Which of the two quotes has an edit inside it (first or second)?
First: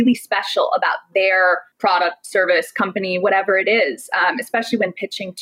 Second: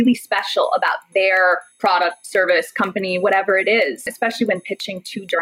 second